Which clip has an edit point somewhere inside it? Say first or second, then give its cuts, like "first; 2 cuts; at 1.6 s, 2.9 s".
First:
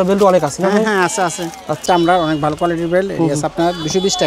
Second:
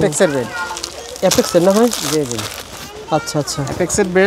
first; 1 cut; at 1.8 s